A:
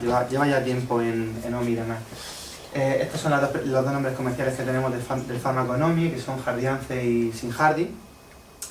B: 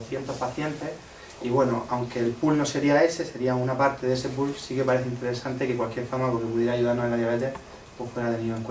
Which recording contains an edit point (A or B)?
A